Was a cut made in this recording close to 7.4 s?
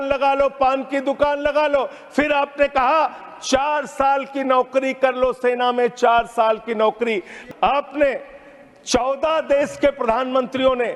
yes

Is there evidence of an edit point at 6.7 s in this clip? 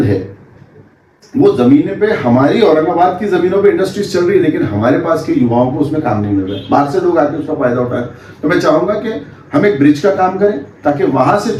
no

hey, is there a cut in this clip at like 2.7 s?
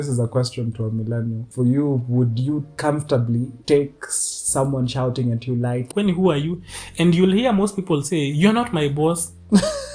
yes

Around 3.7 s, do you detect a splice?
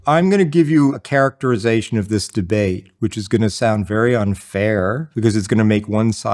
no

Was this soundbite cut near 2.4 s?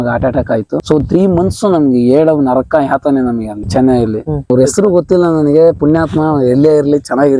no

